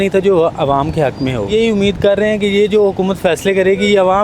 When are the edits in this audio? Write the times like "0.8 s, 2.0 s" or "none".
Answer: 1.5 s